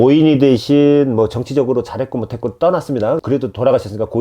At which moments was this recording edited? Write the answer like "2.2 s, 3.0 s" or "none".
3.2 s